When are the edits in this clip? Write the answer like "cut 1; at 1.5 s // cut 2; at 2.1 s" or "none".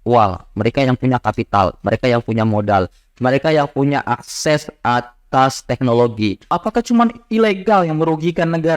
cut 1; at 6.5 s